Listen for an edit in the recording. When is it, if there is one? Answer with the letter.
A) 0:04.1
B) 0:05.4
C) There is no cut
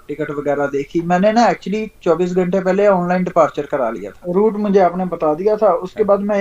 A